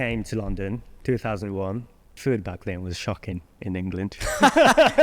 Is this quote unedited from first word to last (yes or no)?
no